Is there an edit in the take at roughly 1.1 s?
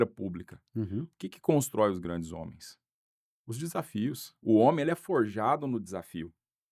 no; 1 cut; at 4.3 s

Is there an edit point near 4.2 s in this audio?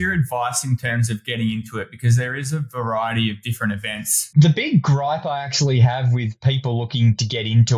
yes; 1 cut; at 4.2 s

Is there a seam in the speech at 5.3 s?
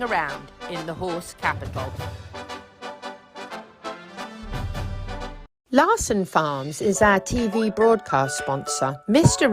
yes; 1 cut; at 5.3 s

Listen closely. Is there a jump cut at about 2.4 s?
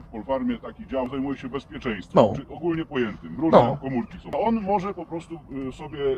no; 2 cuts; at 1.1 s, 4.3 s

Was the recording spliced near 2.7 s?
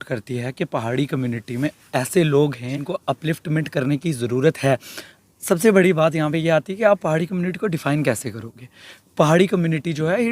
yes; 1 cut; at 2.7 s

